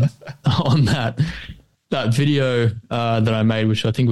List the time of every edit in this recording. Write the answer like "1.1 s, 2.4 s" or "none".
none